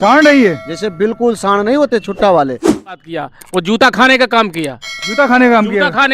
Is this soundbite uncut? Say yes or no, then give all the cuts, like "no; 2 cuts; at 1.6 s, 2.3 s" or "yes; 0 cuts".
no; 1 cut; at 2.9 s